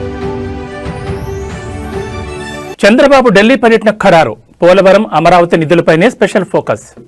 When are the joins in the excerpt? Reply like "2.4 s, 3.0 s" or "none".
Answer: none